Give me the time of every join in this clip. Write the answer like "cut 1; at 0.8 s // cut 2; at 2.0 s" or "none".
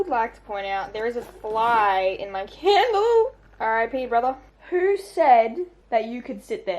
cut 1; at 3.4 s // cut 2; at 4.5 s // cut 3; at 5.8 s